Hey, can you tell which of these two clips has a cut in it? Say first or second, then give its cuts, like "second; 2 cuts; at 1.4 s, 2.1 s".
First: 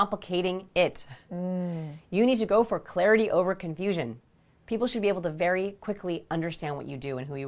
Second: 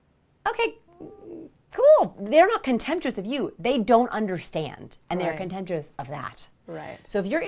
second; 1 cut; at 2.2 s